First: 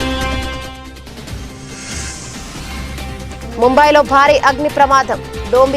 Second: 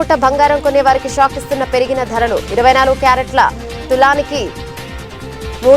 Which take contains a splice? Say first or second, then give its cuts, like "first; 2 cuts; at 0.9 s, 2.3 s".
first; 1 cut; at 3.6 s